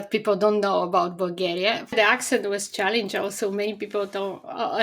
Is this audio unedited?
no; 1 cut; at 1.9 s

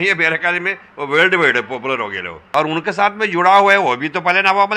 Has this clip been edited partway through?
yes; 1 cut; at 2.4 s

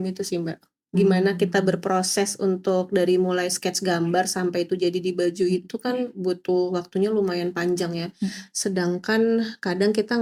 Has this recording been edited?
no; 0 cuts

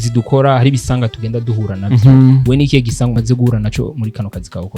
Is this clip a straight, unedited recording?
no; 1 cut; at 3.2 s

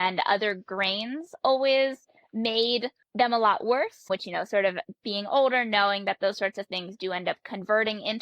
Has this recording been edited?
yes; 1 cut; at 3.0 s

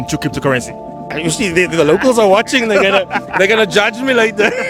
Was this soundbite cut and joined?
no; 0 cuts

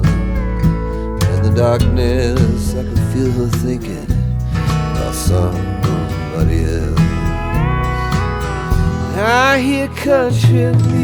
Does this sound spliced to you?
no; 0 cuts

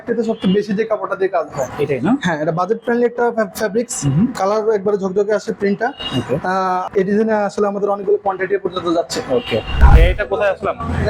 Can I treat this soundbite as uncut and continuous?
no; 2 cuts; at 6.8 s, 9.8 s

